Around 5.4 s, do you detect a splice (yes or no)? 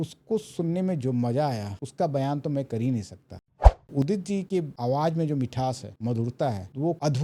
no